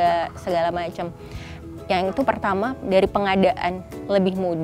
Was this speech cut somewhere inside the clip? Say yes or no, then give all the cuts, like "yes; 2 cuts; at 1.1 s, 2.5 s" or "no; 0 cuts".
no; 0 cuts